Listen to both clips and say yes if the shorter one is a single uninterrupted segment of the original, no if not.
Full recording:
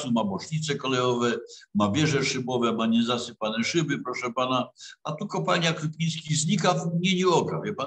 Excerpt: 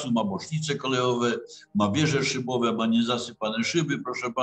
yes